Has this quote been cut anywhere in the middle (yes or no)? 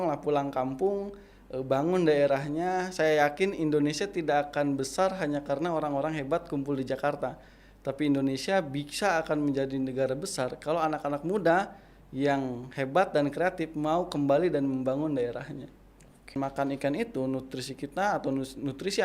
yes